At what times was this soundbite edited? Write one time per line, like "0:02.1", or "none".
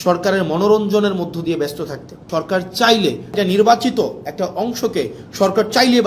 0:02.1
0:03.3